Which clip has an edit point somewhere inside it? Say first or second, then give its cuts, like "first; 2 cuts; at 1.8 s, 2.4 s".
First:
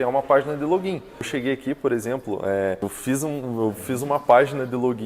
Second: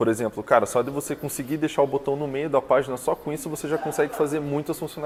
first; 2 cuts; at 1.3 s, 2.8 s